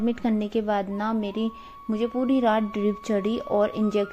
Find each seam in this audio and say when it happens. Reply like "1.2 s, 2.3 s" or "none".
none